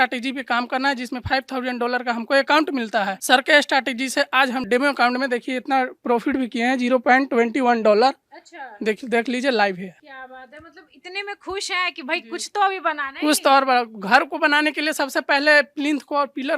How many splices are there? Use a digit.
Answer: 0